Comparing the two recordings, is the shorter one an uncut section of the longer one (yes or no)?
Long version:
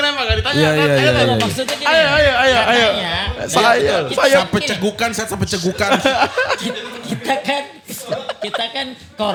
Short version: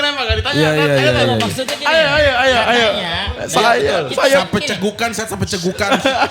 yes